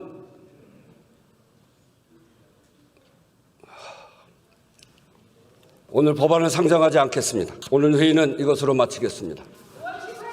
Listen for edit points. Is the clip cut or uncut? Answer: cut